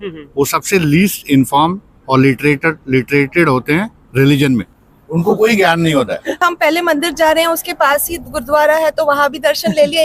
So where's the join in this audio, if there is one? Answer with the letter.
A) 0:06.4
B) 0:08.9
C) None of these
A